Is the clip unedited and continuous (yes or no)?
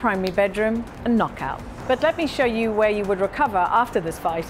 no